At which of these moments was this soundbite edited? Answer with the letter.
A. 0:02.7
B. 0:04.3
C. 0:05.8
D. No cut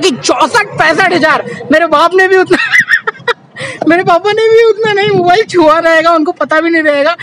D